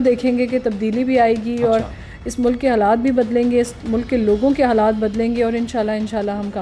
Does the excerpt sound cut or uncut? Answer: uncut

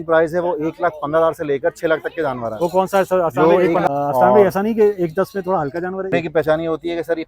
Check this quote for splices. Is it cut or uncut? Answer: cut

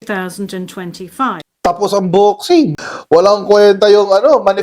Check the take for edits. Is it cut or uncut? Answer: cut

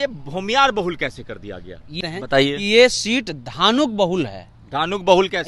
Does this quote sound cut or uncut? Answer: cut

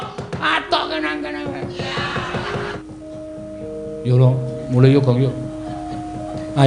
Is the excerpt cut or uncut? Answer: cut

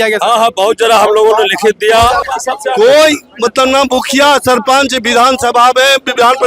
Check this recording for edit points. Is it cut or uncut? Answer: cut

